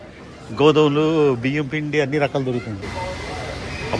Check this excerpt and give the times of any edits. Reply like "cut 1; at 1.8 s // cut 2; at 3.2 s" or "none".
cut 1; at 2.8 s